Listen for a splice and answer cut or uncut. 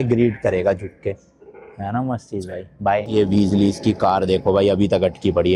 cut